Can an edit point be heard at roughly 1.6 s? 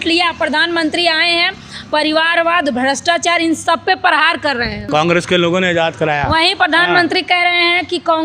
no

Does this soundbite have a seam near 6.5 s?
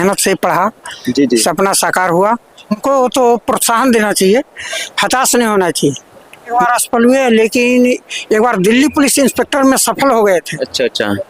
yes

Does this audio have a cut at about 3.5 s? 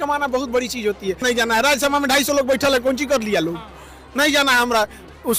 no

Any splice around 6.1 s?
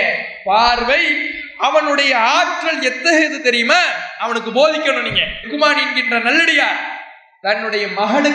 no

